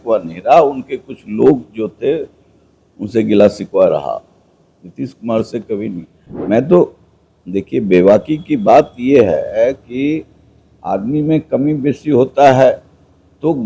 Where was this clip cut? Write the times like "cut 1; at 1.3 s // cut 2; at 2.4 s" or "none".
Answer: none